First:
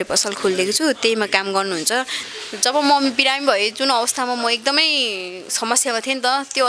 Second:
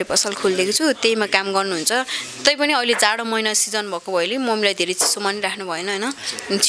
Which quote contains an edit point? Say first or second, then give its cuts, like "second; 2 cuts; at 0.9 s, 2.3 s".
first; 1 cut; at 2.2 s